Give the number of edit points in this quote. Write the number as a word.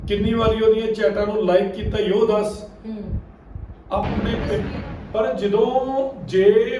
one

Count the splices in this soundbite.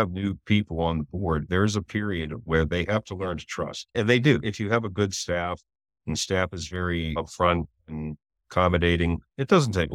two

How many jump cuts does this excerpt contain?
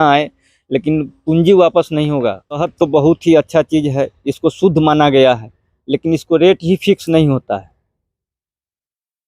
one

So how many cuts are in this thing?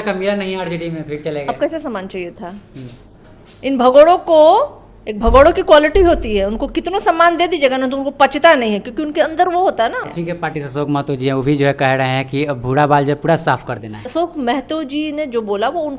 two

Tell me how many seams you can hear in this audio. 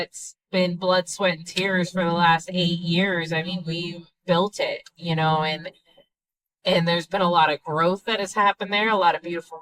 zero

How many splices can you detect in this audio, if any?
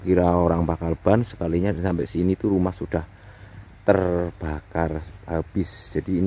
zero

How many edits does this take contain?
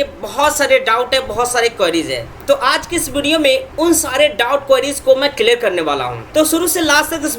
three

